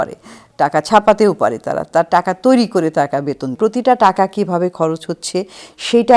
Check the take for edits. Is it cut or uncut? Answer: cut